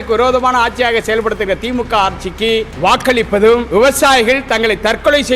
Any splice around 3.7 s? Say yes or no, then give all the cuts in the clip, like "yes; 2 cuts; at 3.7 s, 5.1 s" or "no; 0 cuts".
yes; 2 cuts; at 2.7 s, 3.7 s